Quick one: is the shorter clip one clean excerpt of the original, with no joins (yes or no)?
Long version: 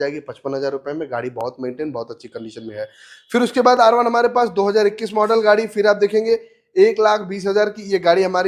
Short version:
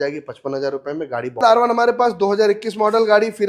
no